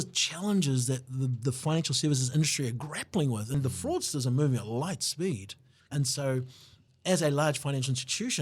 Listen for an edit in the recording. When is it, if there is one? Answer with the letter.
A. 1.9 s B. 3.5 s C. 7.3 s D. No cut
B